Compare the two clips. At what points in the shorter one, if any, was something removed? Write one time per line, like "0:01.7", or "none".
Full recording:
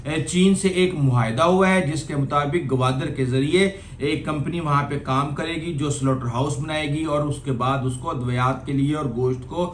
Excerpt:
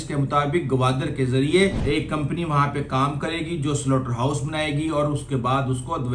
0:01.8